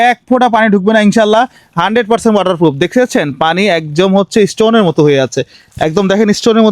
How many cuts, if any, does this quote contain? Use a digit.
0